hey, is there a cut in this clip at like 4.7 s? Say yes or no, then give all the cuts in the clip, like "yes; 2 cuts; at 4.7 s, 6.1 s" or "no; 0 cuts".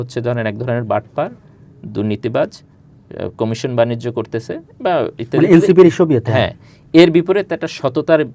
no; 0 cuts